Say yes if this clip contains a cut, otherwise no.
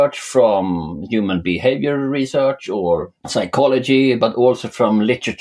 yes